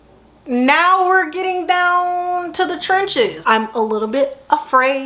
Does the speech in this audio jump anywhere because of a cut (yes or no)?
yes